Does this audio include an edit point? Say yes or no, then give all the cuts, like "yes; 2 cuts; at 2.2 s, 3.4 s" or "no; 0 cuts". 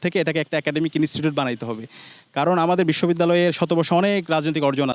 no; 0 cuts